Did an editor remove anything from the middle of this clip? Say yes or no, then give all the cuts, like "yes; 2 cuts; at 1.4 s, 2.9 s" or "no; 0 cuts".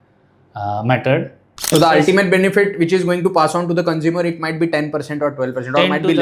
yes; 1 cut; at 1.6 s